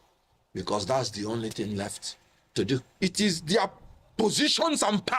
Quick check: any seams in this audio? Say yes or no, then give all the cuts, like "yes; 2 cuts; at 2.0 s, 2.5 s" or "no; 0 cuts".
yes; 1 cut; at 2.9 s